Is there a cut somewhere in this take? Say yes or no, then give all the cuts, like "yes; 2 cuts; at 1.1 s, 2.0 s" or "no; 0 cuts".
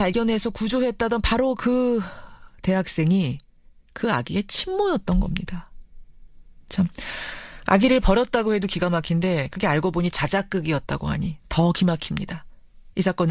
no; 0 cuts